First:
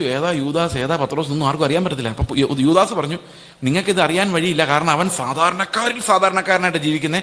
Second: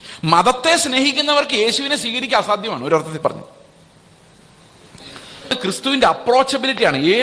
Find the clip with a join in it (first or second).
second